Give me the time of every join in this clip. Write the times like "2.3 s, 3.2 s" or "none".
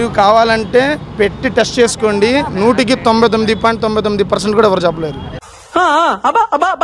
none